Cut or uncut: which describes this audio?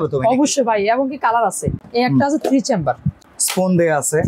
cut